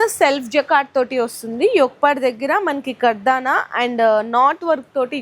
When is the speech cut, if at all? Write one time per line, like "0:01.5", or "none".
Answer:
none